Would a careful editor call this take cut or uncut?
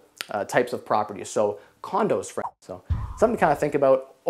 cut